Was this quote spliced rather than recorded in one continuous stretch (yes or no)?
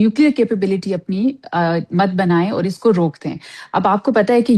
no